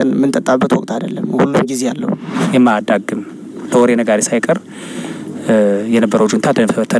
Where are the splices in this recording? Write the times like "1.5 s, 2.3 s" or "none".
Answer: 2.4 s